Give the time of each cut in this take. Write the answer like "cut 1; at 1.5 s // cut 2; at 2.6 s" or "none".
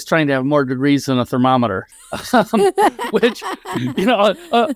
none